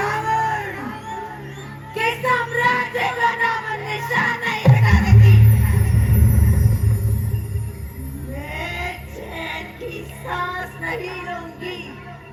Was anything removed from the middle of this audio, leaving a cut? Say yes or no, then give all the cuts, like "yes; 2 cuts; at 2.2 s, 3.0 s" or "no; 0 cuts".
no; 0 cuts